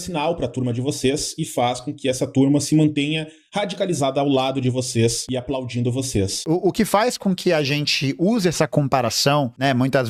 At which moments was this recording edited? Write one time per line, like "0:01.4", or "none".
none

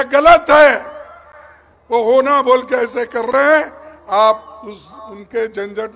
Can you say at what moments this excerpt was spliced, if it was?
none

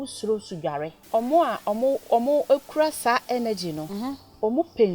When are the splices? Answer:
0:01.0

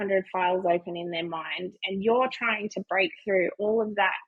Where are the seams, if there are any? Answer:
none

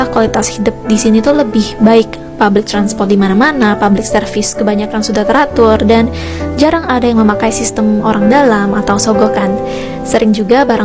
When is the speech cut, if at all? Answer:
none

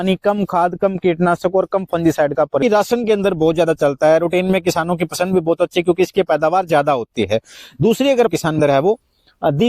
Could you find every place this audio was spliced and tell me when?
0:02.6
0:08.3

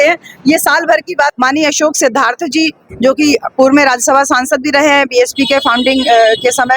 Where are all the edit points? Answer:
0:01.3

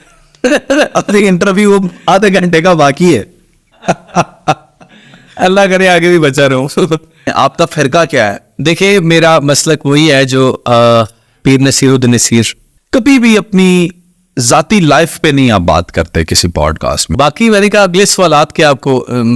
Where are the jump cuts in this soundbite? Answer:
0:07.3
0:12.7
0:17.1

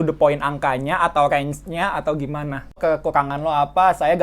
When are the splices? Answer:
0:02.8

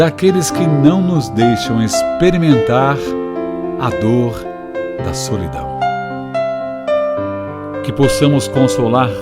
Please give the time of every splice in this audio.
0:05.5

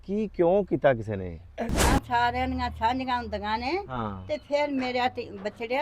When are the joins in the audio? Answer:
0:01.9

